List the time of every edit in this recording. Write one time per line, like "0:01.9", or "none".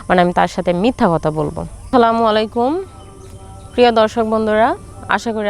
0:01.9